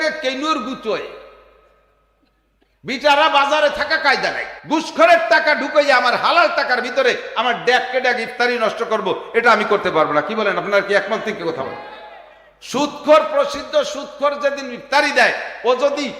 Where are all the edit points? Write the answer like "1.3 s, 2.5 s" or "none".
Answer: 4.5 s